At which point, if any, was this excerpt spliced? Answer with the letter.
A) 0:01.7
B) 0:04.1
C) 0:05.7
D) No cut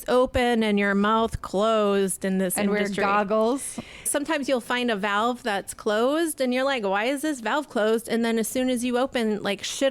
B